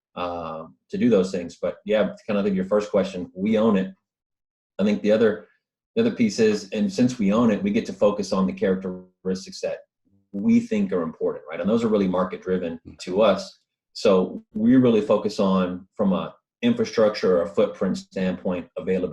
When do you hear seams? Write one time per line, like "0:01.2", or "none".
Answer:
0:12.9